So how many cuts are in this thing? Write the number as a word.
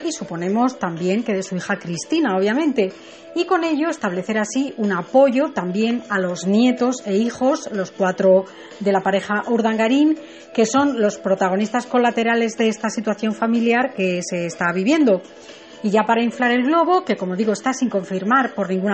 zero